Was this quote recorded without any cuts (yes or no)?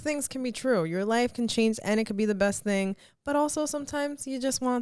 yes